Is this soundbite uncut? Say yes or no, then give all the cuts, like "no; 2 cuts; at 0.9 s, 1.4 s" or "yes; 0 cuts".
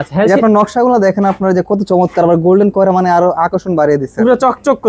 yes; 0 cuts